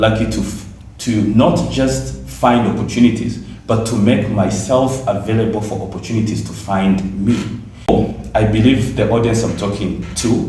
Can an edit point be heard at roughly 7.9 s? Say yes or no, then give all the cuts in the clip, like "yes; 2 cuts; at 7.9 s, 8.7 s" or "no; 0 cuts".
yes; 1 cut; at 7.9 s